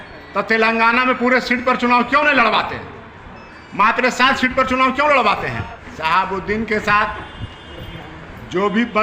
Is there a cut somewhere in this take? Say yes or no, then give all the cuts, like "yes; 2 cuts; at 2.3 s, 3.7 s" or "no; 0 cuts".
yes; 1 cut; at 5.8 s